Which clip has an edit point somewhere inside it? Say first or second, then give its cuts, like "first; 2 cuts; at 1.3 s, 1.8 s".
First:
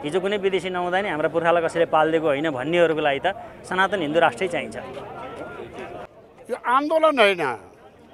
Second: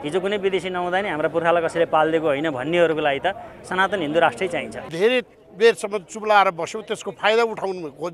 second; 1 cut; at 4.9 s